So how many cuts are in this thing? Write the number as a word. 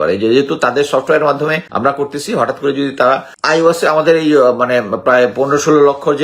two